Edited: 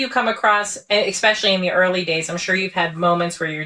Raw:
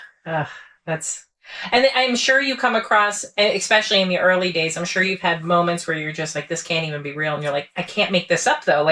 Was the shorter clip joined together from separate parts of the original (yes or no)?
no